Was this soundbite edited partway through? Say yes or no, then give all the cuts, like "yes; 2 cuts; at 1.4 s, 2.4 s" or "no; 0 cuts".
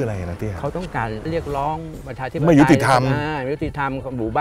no; 0 cuts